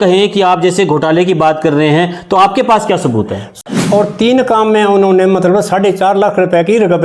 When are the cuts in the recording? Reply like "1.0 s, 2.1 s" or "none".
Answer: 3.6 s